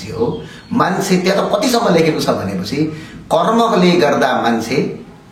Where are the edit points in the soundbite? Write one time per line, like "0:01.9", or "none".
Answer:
none